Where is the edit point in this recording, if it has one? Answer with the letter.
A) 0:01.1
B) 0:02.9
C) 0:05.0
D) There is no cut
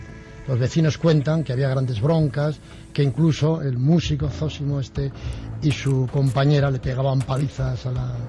D